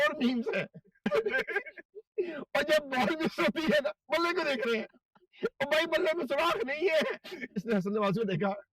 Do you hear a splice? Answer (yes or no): yes